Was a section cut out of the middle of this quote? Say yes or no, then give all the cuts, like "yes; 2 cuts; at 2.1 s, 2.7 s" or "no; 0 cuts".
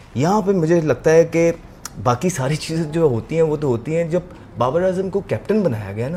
no; 0 cuts